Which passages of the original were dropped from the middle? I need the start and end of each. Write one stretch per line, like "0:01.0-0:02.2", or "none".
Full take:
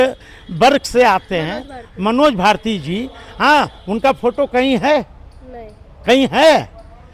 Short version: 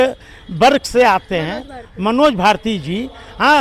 none